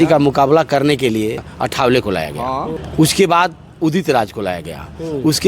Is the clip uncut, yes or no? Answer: no